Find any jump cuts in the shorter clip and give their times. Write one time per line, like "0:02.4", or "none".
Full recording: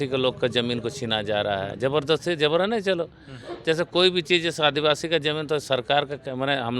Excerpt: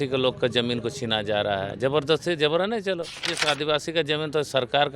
0:03.3